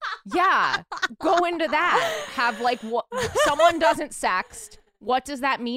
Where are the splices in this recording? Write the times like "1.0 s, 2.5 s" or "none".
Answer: none

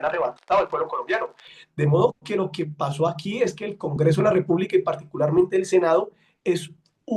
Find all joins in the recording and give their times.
none

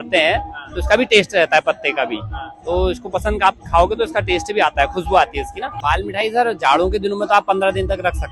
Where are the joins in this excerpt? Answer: 5.6 s

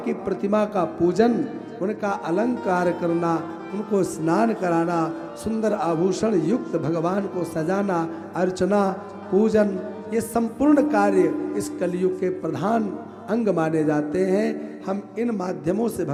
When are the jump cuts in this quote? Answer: none

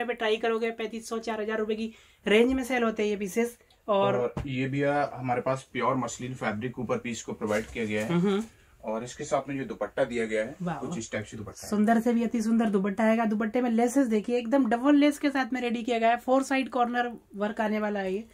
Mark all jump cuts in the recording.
none

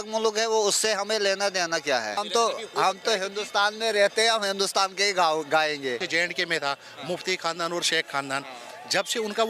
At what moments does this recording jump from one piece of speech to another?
2.2 s, 6.0 s

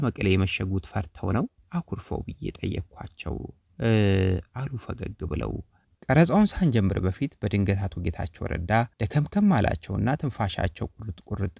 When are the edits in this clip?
5.9 s

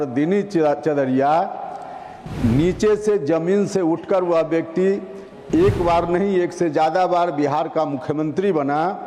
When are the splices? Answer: none

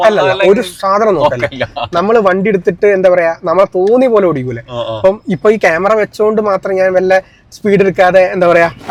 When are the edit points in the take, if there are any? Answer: none

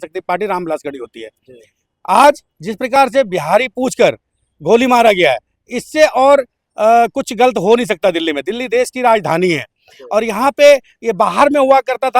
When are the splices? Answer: none

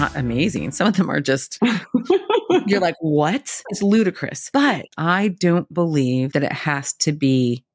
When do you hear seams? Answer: none

